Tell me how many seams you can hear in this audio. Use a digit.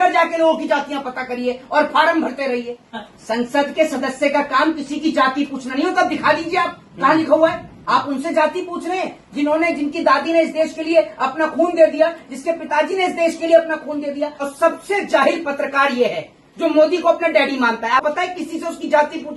4